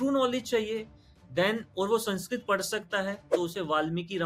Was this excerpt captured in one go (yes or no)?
yes